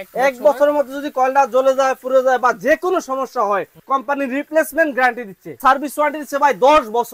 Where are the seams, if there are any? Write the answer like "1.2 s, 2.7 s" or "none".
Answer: 3.8 s, 5.6 s